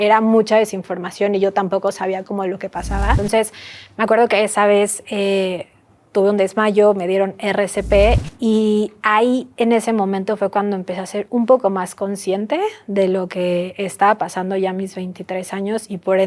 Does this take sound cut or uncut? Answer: cut